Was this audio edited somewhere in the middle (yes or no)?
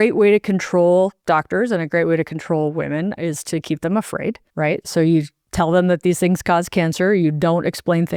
yes